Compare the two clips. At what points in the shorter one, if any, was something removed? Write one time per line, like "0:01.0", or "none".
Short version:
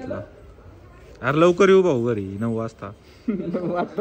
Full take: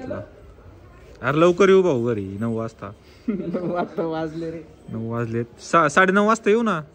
none